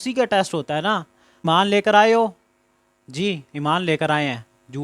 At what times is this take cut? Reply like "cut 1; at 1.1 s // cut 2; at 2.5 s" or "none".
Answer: cut 1; at 1.4 s